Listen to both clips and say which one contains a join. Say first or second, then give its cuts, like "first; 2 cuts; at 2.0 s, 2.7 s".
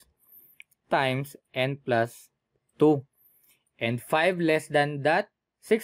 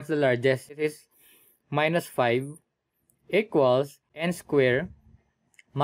second; 2 cuts; at 0.8 s, 4.0 s